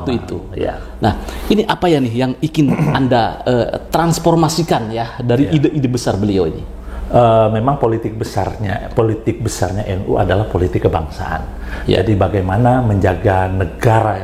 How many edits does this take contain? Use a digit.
0